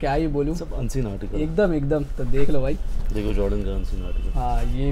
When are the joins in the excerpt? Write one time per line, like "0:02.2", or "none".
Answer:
none